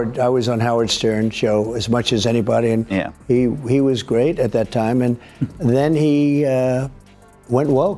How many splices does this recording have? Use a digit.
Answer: 0